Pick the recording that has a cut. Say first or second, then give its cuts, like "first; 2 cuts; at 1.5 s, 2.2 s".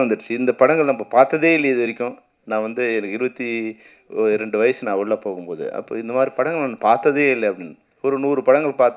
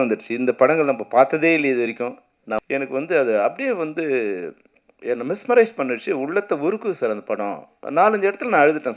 second; 1 cut; at 2.6 s